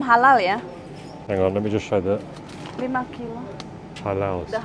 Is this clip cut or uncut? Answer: cut